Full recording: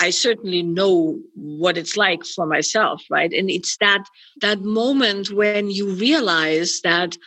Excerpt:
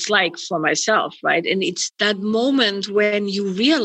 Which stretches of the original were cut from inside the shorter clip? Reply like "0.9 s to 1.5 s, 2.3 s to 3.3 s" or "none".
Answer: 3.7 s to 4.2 s